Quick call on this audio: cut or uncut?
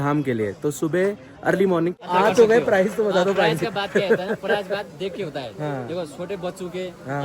cut